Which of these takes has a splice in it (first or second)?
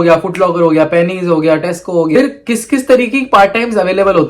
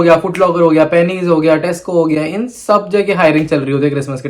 first